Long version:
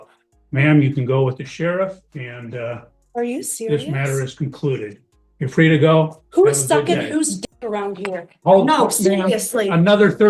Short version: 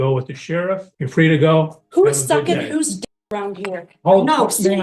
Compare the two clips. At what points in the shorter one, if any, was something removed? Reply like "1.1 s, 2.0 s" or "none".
0.9 s